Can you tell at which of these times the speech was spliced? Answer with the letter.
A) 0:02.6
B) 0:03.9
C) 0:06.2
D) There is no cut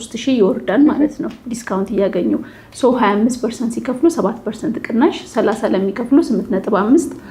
D